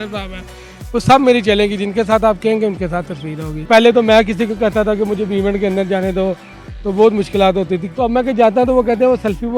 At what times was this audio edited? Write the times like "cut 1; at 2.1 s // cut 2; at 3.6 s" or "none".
cut 1; at 3.7 s // cut 2; at 7.9 s